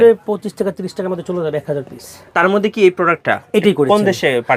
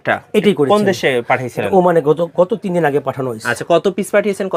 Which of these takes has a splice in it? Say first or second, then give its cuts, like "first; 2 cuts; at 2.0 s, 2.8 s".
first; 1 cut; at 2.1 s